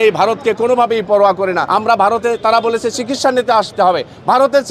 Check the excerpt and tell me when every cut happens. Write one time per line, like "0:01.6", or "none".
none